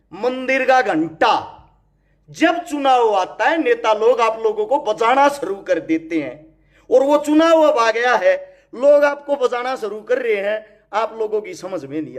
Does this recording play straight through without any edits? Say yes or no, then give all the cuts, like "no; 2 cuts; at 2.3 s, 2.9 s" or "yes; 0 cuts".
yes; 0 cuts